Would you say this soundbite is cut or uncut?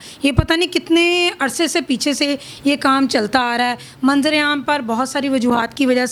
uncut